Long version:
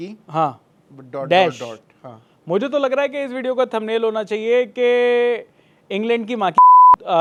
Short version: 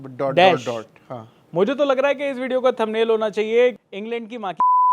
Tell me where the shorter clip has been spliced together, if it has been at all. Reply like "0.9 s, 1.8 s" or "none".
3.8 s